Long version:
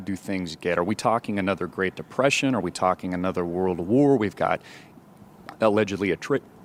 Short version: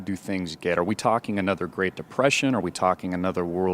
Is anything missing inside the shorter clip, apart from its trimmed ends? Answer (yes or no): no